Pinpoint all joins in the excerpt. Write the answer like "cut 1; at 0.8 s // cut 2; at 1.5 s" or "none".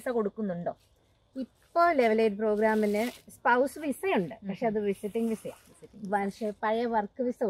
none